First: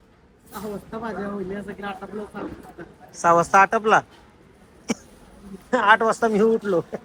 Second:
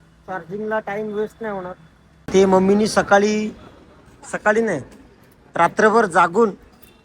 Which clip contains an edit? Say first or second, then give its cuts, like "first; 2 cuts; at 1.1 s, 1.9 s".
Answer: second; 1 cut; at 2.2 s